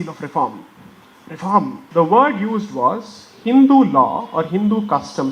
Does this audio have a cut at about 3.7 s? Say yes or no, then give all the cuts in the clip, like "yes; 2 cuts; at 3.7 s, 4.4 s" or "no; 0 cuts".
no; 1 cut; at 1.8 s